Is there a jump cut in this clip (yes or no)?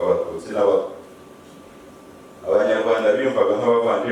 no